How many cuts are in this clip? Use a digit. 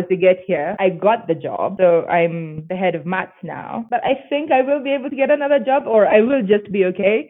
3